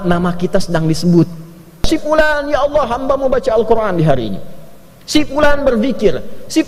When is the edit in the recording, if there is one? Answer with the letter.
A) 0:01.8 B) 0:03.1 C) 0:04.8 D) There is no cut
A